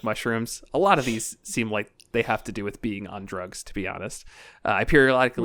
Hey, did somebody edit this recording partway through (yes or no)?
no